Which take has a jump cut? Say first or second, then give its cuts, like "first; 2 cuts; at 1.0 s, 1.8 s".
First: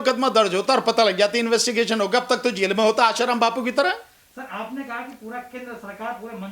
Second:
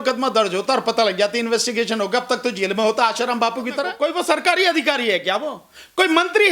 second; 1 cut; at 3.9 s